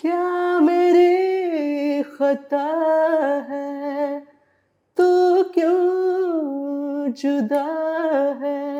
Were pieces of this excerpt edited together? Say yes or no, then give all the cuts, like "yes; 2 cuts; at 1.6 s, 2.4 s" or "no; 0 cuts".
no; 0 cuts